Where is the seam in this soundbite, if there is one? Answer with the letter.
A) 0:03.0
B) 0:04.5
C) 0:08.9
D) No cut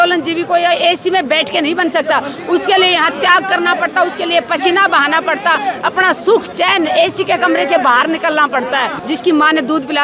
C